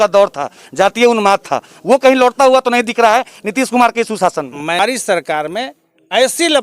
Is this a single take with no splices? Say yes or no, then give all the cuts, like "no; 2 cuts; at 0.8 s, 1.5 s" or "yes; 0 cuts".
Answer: no; 1 cut; at 4.8 s